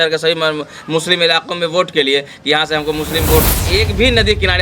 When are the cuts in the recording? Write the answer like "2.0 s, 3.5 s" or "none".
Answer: 3.5 s